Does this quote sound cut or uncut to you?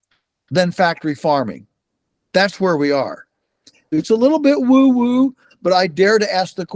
cut